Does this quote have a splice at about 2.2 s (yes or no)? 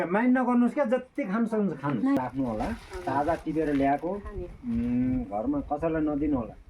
yes